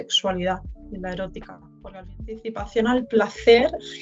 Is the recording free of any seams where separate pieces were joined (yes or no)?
no